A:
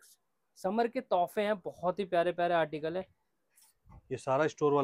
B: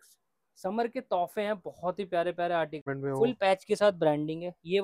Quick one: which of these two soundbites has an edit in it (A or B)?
B